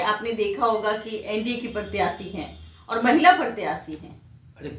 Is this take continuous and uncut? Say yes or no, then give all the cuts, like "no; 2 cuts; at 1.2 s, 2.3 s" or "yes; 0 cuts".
yes; 0 cuts